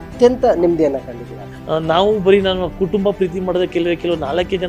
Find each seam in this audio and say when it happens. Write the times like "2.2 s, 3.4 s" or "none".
1.4 s